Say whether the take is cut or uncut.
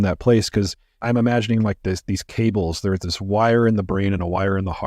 cut